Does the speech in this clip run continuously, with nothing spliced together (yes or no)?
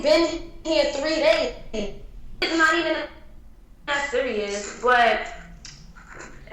no